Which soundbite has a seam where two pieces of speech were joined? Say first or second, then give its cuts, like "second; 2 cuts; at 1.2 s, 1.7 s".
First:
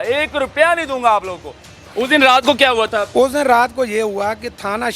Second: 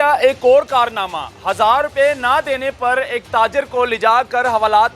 first; 1 cut; at 1.7 s